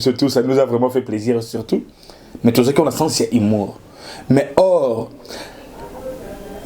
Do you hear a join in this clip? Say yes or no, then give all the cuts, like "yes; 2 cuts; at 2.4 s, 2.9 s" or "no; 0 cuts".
no; 0 cuts